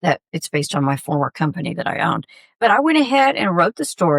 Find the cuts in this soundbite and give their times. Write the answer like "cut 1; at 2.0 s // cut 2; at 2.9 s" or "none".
cut 1; at 2.5 s